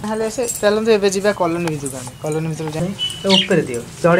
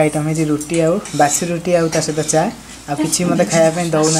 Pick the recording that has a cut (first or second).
first